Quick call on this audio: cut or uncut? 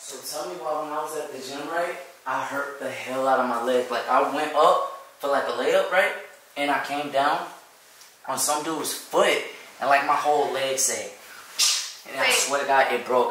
uncut